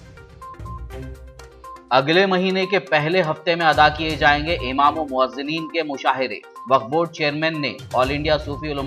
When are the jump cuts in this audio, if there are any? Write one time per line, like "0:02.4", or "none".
0:01.8